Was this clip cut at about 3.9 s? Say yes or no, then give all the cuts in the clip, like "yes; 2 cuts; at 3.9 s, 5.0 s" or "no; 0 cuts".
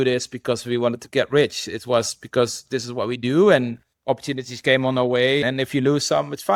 no; 0 cuts